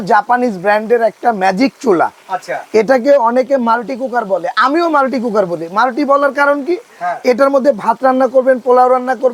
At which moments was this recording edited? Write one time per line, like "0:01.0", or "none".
none

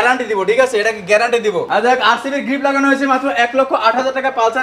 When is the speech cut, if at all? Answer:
0:01.7

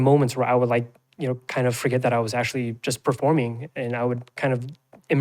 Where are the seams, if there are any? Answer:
none

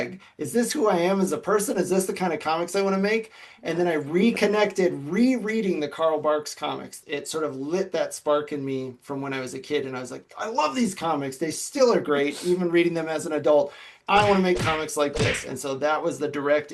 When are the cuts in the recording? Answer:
0:06.9
0:14.0

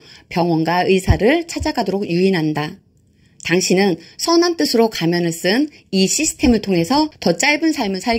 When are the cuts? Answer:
0:07.1

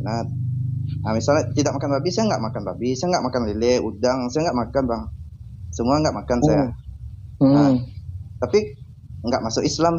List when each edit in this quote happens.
none

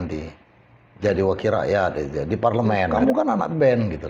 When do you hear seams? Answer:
0:02.9

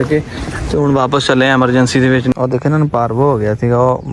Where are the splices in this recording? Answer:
0:02.3

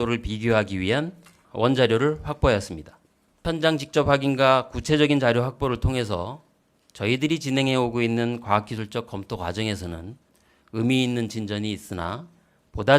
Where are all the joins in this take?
0:01.4
0:03.4

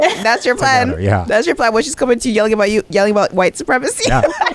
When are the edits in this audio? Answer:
0:02.9

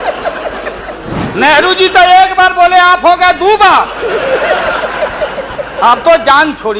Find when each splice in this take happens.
0:01.2

